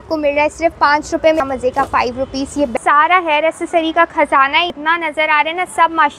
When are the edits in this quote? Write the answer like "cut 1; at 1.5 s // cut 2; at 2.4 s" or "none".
cut 1; at 1.4 s // cut 2; at 2.7 s // cut 3; at 4.7 s